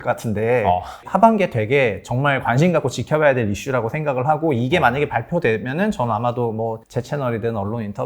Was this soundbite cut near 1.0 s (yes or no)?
yes